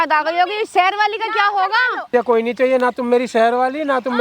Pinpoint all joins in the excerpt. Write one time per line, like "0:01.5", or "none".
0:02.1